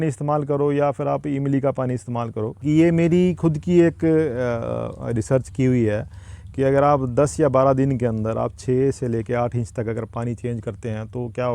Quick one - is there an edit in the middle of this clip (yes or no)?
yes